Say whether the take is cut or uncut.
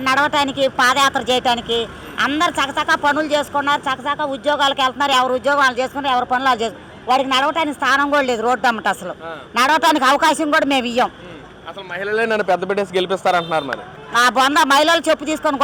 uncut